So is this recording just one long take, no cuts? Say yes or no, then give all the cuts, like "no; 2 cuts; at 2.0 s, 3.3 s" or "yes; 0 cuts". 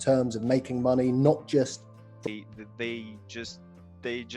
no; 1 cut; at 2.0 s